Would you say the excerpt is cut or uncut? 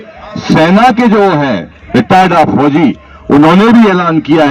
uncut